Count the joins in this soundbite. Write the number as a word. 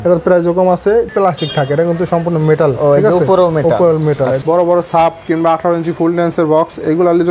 two